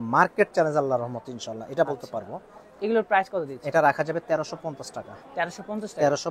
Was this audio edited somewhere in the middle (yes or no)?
no